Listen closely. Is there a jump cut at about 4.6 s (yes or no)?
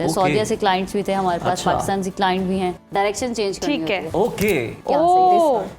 no